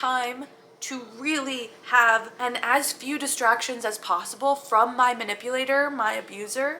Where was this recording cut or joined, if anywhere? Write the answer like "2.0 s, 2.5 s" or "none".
2.3 s